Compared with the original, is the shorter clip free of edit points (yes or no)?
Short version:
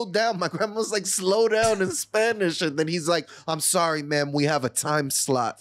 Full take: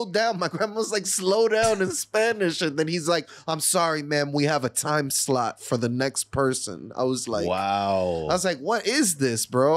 yes